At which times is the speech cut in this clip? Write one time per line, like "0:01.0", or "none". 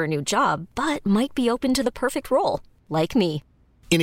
none

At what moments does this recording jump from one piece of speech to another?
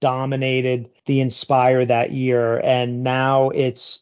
0:00.9

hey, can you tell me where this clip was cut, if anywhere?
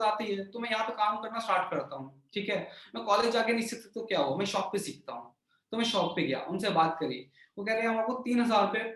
none

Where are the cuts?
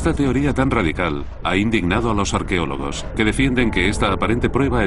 0:03.2

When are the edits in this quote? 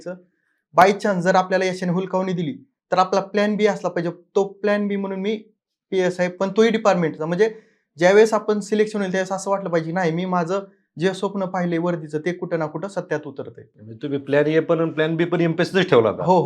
none

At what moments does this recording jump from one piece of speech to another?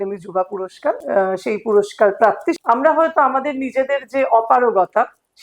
0:01.0
0:02.6

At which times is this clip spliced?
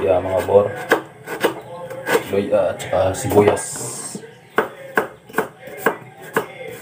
none

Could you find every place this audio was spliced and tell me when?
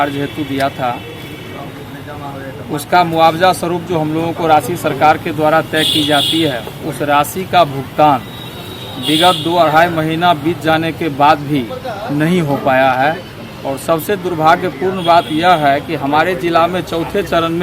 none

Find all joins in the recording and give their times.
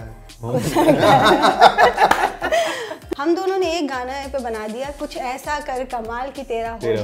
0:02.9

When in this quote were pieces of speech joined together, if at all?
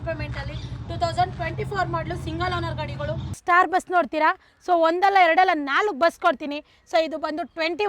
0:03.4

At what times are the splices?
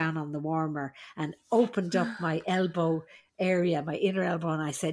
none

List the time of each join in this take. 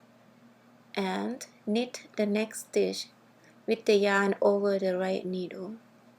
0:00.9

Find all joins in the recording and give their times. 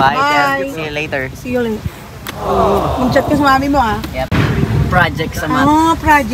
0:04.3

